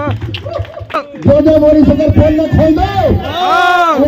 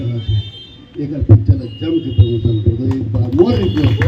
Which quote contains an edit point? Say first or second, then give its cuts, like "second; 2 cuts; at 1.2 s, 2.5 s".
first; 1 cut; at 1.0 s